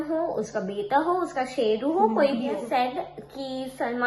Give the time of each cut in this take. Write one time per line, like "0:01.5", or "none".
0:02.6